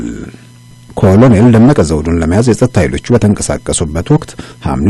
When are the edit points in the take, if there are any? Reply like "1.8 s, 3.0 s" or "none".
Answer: none